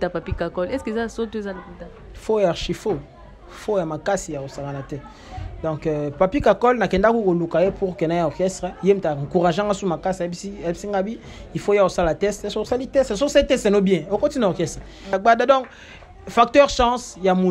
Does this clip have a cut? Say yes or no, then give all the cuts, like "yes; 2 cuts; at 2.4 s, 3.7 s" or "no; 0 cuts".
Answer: yes; 1 cut; at 15.2 s